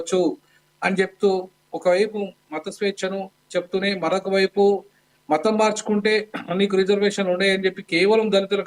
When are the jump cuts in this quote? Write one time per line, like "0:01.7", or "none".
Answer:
none